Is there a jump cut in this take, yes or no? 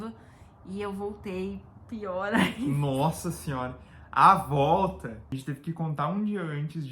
yes